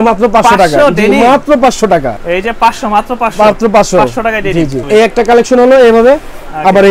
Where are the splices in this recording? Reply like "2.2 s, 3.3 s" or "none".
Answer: 2.1 s, 4.8 s

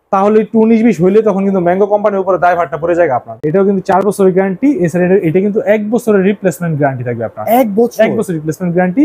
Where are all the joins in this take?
3.3 s

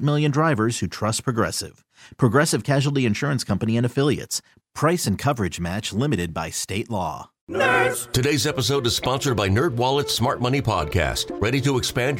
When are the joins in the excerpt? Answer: 7.3 s

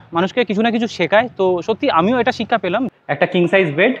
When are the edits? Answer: 2.9 s

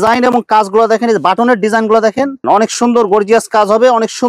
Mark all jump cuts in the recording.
2.4 s

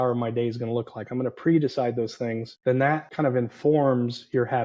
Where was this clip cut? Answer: 2.5 s, 3.1 s

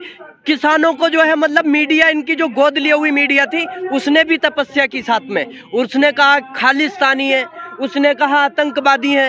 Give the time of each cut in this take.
none

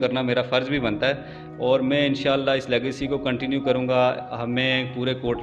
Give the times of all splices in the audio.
none

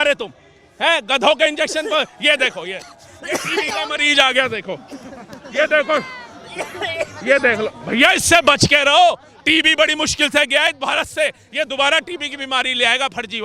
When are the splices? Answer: none

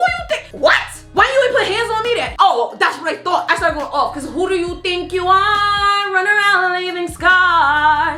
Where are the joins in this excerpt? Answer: 1.0 s, 2.3 s, 3.4 s

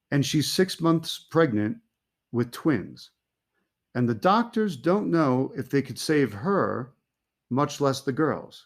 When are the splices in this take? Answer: 2.8 s

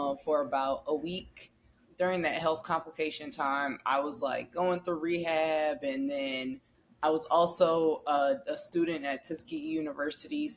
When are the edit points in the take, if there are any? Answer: 1.8 s

